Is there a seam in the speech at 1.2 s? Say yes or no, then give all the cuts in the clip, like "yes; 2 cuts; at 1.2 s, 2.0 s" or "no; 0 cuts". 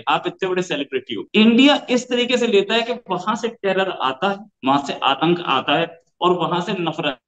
yes; 1 cut; at 1.2 s